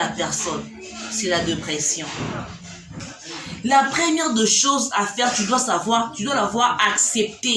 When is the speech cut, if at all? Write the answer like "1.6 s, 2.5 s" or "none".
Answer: 3.0 s